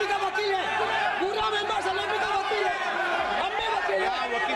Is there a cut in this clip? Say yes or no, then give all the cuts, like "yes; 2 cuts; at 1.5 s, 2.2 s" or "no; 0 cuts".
no; 0 cuts